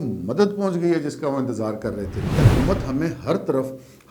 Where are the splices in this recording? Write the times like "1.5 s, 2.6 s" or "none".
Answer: 2.4 s